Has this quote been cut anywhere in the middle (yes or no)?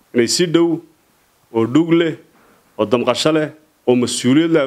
no